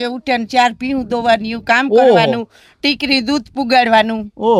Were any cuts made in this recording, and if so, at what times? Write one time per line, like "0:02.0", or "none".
none